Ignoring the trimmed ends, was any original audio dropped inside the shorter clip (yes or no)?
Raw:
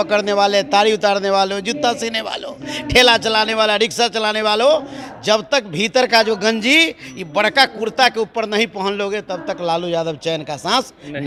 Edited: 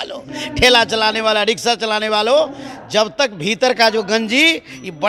no